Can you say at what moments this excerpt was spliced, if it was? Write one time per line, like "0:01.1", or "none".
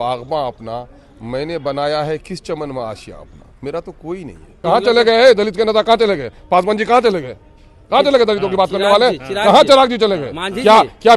0:04.5